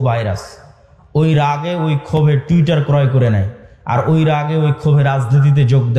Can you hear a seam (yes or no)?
no